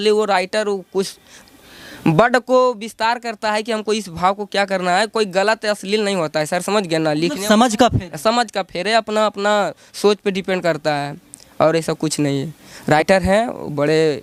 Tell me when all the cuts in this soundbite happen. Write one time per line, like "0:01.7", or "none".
none